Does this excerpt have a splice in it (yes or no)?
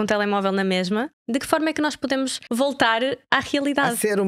yes